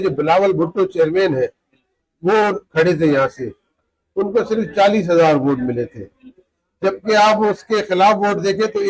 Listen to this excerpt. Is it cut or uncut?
uncut